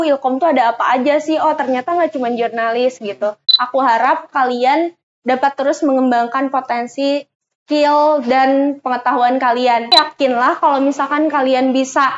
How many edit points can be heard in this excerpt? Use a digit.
2